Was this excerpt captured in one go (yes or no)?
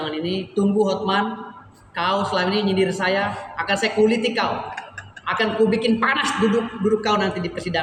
yes